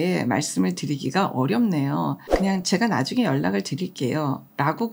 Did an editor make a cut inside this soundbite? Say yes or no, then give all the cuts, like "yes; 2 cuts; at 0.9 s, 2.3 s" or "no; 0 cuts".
yes; 1 cut; at 2.2 s